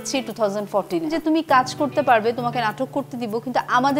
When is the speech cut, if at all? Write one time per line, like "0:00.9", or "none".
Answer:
0:01.1